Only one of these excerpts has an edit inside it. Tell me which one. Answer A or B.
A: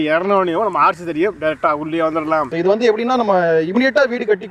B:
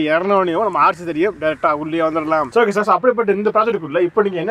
A